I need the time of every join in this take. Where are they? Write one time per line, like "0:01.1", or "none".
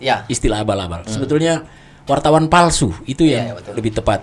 none